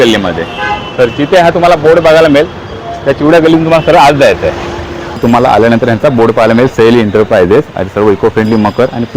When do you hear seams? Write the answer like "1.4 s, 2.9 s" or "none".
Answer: 5.2 s